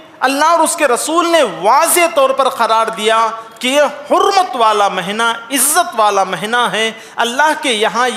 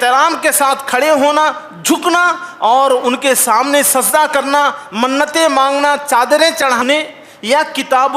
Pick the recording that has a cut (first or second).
second